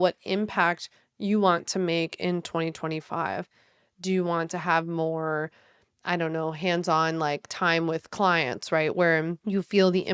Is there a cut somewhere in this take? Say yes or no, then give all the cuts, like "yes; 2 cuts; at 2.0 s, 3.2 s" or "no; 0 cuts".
no; 0 cuts